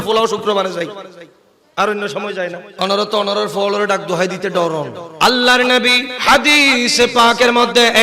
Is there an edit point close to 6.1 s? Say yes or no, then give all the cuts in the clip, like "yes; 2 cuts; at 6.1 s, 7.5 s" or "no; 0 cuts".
yes; 3 cuts; at 2.6 s, 5.0 s, 6.1 s